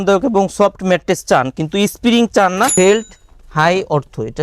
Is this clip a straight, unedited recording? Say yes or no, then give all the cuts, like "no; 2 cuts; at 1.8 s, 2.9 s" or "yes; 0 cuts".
no; 1 cut; at 2.7 s